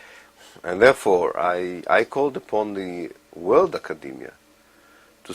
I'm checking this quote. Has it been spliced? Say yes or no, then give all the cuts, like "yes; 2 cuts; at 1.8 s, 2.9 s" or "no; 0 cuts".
yes; 1 cut; at 1.7 s